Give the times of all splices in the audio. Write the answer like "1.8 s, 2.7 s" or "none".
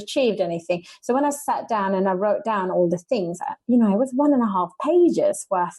none